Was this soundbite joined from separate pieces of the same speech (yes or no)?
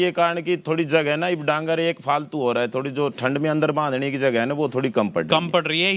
no